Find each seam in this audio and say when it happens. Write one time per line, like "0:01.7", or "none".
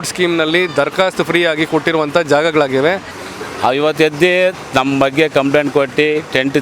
0:03.1